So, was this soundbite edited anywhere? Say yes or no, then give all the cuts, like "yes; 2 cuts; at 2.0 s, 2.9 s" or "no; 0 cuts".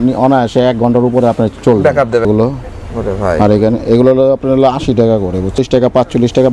yes; 2 cuts; at 2.3 s, 5.6 s